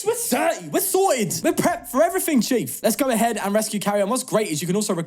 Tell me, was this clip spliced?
yes; 2 cuts; at 1.3 s, 2.7 s

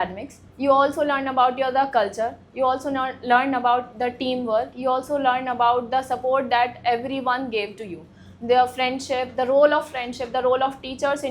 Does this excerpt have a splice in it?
no; 0 cuts

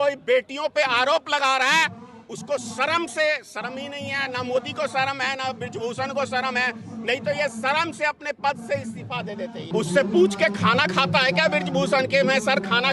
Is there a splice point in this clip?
yes; 1 cut; at 9.7 s

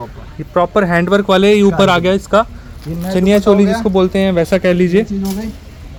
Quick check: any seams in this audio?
no; 0 cuts

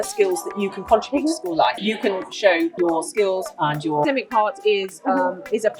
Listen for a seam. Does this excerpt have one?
yes; 1 cut; at 4.0 s

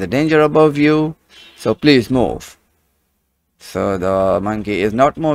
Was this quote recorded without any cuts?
yes; 0 cuts

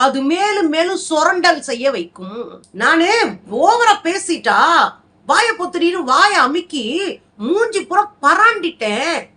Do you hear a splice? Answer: yes; 1 cut; at 2.6 s

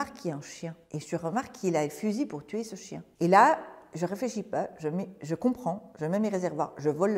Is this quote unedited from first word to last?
yes; 0 cuts

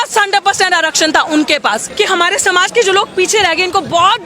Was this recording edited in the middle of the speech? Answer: yes; 1 cut; at 1.9 s

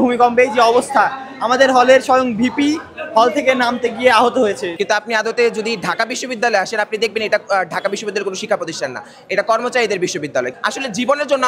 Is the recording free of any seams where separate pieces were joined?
no; 2 cuts; at 4.7 s, 10.5 s

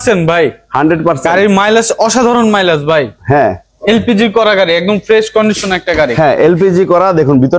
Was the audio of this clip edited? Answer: no; 0 cuts

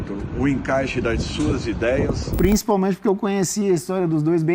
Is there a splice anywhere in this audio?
yes; 1 cut; at 2.3 s

